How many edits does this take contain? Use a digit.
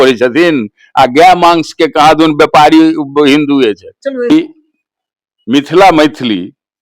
1